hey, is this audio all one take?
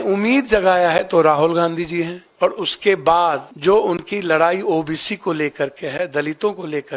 no; 2 cuts; at 2.2 s, 3.5 s

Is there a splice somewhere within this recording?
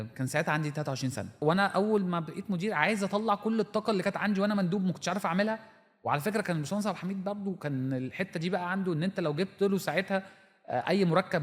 yes; 1 cut; at 1.4 s

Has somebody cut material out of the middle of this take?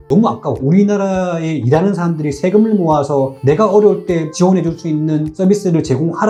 no; 0 cuts

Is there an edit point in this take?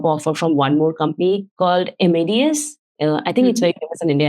yes; 1 cut; at 1.5 s

